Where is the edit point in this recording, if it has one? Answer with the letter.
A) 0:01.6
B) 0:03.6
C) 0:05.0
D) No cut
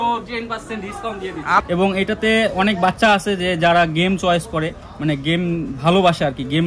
A